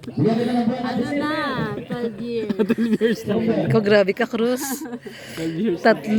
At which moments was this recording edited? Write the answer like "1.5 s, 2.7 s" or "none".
none